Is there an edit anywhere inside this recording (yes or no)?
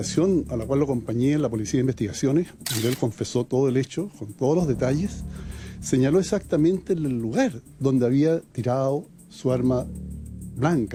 no